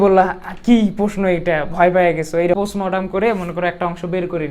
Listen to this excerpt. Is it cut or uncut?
cut